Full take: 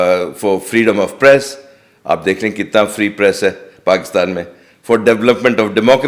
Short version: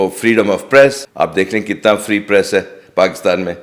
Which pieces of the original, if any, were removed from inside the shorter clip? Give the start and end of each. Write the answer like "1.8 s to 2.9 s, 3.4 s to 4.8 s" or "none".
1.5 s to 1.9 s